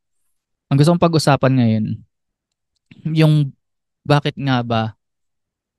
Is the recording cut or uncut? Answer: uncut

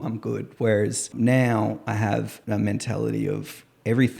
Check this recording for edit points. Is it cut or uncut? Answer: cut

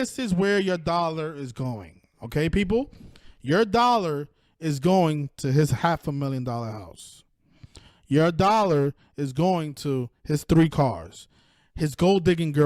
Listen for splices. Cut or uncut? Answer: uncut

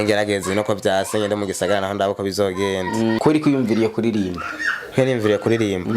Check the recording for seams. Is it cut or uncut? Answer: cut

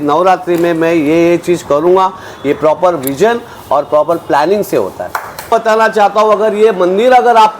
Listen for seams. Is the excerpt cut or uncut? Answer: cut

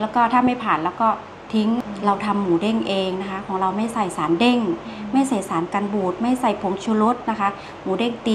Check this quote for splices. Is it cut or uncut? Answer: cut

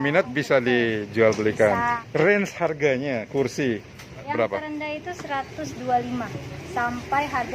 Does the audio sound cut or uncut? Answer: cut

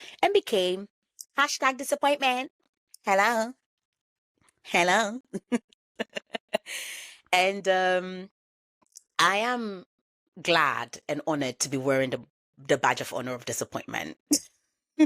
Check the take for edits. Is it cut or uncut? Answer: uncut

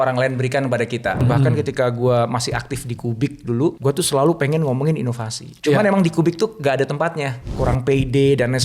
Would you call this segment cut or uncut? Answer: cut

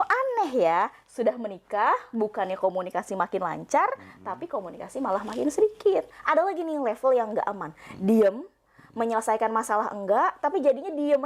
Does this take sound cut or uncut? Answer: cut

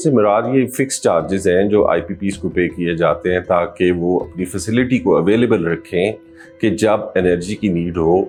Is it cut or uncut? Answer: uncut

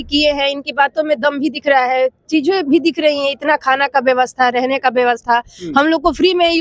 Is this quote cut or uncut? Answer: uncut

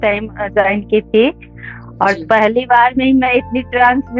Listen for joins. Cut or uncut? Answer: uncut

